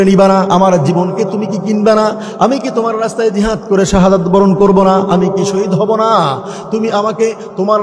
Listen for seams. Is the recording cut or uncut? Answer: uncut